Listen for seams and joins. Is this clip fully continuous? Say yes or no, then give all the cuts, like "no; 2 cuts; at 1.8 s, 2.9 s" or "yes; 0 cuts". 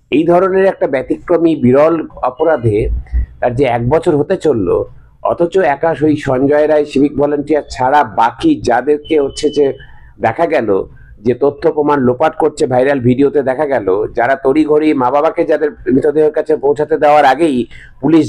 yes; 0 cuts